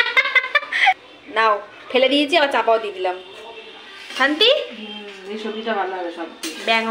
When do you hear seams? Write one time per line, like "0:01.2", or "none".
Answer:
0:01.1